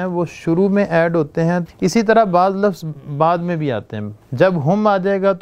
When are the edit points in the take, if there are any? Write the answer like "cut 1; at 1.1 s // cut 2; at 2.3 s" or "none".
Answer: cut 1; at 1.6 s // cut 2; at 4.2 s

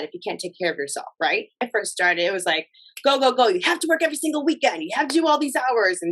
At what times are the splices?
cut 1; at 1.6 s

